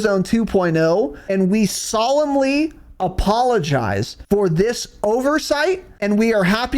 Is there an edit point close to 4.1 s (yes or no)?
yes